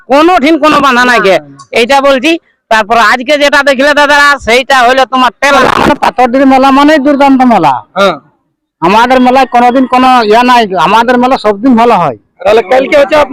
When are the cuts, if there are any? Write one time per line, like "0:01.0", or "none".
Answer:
0:05.5
0:12.4